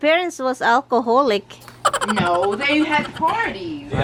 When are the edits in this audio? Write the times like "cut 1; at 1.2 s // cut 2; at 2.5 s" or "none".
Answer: none

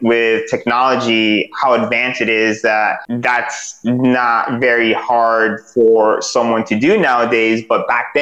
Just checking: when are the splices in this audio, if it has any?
cut 1; at 3.1 s

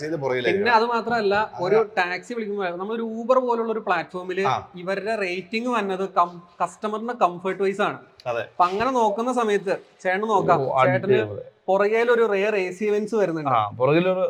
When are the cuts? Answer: none

